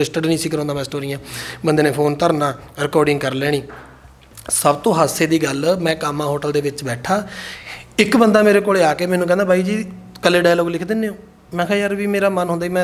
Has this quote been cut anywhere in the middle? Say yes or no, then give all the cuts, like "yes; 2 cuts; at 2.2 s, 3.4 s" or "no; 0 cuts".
no; 0 cuts